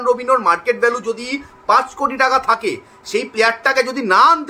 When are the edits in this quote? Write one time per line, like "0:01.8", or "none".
none